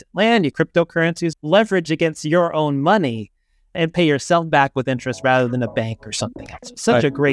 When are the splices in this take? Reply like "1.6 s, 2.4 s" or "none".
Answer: 1.0 s